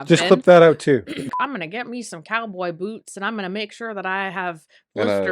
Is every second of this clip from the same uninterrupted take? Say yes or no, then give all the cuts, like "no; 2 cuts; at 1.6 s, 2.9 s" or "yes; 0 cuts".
no; 1 cut; at 1.2 s